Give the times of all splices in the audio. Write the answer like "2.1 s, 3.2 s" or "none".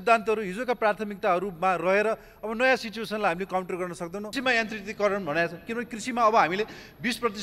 4.3 s